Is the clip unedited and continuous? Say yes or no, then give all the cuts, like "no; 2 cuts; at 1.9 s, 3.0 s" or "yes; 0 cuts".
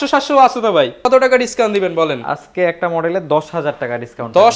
no; 1 cut; at 1.1 s